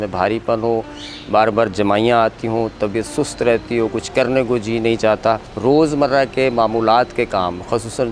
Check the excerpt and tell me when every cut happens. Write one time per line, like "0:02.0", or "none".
0:05.5